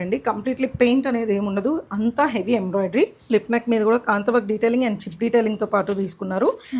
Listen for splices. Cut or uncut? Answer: cut